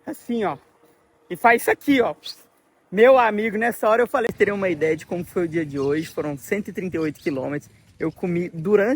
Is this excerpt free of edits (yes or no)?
no